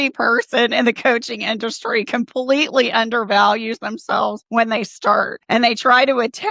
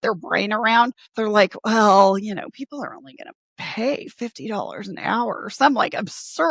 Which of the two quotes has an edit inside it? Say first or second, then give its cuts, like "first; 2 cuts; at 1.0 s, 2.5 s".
first; 2 cuts; at 4.4 s, 5.4 s